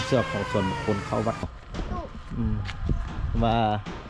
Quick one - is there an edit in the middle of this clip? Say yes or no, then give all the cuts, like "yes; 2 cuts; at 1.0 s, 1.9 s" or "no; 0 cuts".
yes; 1 cut; at 1.4 s